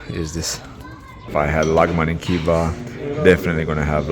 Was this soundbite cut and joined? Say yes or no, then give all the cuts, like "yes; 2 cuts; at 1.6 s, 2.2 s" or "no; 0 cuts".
yes; 1 cut; at 1.3 s